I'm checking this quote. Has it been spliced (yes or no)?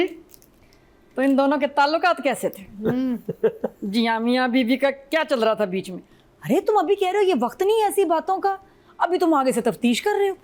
no